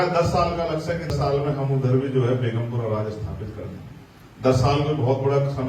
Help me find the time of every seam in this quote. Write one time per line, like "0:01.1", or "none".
0:01.1